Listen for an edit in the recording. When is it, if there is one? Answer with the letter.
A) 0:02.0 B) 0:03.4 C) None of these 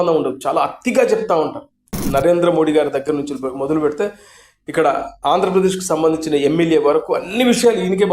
A